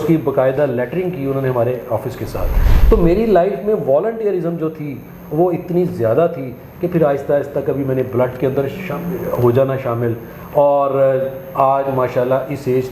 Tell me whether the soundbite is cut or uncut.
cut